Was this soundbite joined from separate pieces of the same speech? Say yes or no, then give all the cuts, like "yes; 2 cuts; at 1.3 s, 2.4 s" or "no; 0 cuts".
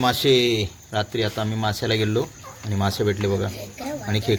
no; 0 cuts